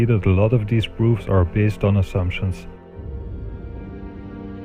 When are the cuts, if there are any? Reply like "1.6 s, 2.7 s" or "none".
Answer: none